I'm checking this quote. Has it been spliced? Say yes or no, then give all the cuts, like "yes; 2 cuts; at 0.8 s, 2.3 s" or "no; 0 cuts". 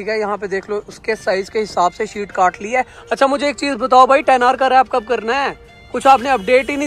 no; 0 cuts